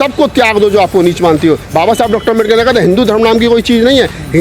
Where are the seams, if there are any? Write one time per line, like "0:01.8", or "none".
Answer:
0:01.6